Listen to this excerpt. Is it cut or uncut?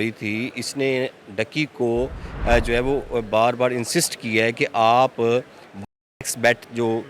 uncut